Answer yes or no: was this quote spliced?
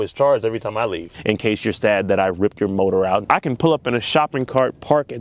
yes